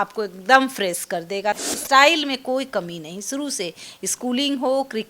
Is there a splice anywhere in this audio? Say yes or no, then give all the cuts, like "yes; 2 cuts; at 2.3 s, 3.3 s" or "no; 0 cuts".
yes; 1 cut; at 1.6 s